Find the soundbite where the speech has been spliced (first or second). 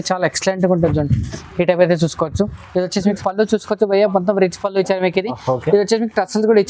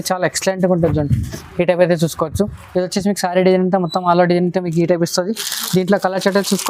first